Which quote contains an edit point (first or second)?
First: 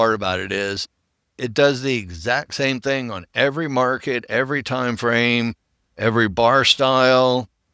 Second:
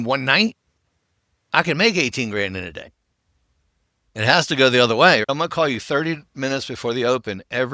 second